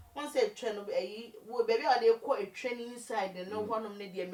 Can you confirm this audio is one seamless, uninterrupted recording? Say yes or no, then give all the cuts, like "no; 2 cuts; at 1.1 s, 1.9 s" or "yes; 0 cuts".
yes; 0 cuts